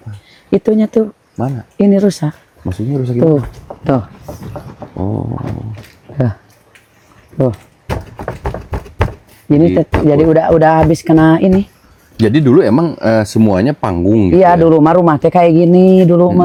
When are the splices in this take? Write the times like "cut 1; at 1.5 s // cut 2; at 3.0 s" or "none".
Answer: none